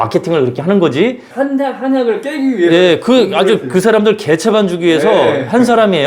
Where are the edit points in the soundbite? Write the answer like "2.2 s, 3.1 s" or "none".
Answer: 1.3 s